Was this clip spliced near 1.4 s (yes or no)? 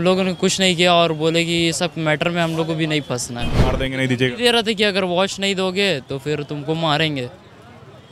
no